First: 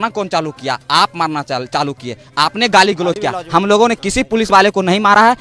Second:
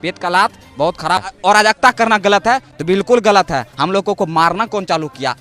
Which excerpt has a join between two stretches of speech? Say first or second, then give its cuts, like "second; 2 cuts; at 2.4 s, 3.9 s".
second; 1 cut; at 1.3 s